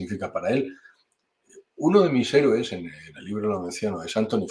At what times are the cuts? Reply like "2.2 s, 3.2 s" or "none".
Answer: none